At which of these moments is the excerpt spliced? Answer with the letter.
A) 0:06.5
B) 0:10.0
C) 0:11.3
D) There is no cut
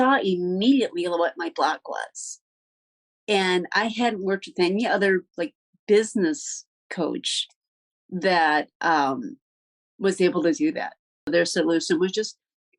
C